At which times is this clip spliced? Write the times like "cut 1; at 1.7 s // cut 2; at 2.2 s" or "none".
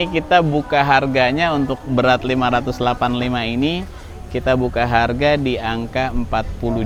none